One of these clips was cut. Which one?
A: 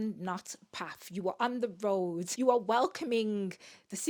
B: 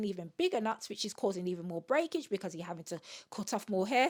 A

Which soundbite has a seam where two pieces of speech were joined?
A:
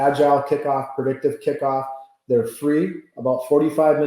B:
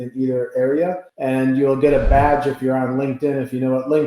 B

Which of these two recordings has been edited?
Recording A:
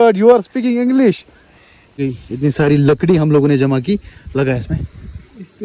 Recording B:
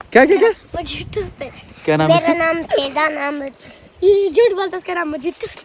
A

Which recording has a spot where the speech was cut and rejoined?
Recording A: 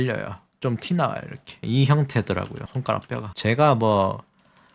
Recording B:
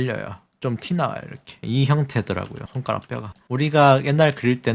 B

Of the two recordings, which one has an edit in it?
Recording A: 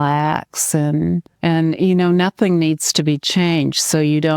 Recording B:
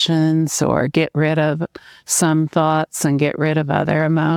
A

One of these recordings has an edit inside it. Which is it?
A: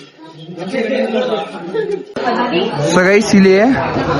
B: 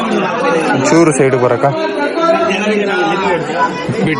A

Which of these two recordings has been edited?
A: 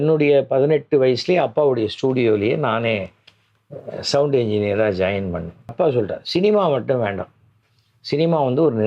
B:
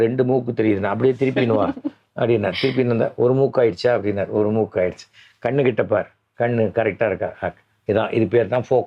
A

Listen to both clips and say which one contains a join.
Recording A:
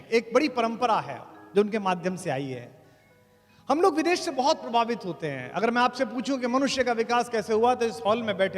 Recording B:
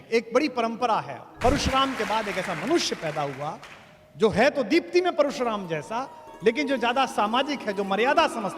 B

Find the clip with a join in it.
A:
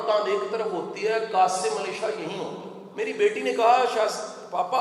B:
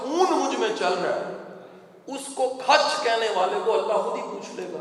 A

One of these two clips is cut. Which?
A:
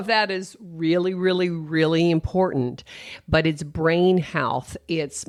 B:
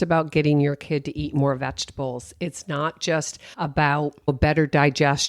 B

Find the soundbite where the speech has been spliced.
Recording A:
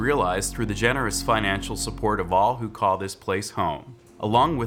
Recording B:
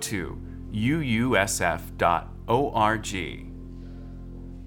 B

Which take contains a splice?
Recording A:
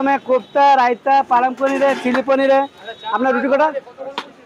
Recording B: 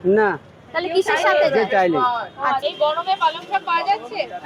B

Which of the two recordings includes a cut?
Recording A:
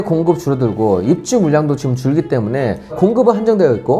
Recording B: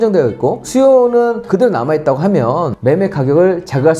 B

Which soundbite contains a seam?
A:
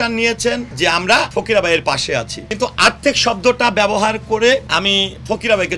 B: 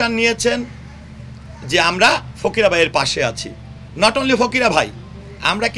A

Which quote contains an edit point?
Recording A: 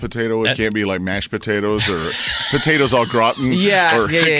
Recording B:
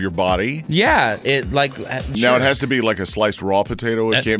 B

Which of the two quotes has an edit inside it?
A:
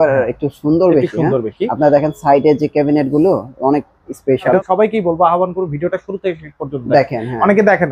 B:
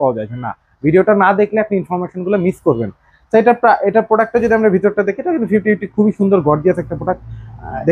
A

